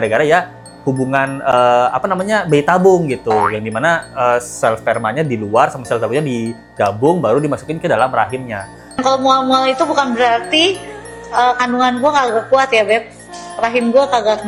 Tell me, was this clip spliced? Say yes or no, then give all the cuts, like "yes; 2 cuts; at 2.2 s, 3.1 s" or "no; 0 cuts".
no; 0 cuts